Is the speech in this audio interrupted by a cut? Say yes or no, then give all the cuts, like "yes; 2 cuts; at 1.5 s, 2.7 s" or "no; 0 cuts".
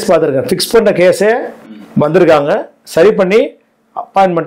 no; 0 cuts